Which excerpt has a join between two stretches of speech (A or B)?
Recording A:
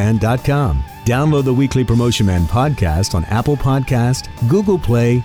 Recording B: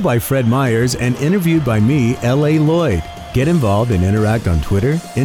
A